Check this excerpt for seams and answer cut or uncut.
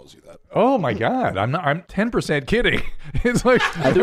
cut